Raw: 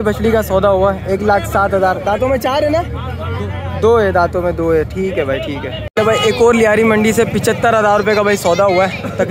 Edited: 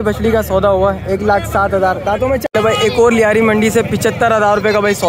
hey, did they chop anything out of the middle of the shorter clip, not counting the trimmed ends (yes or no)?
yes